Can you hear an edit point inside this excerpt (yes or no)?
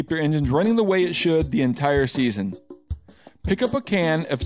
no